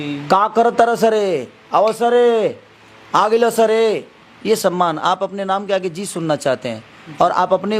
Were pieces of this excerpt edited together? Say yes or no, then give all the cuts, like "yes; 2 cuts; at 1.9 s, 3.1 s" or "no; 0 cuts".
no; 0 cuts